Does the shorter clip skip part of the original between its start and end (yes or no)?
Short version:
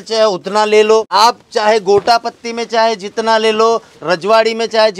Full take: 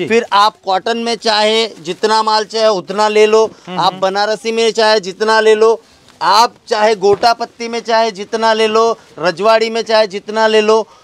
yes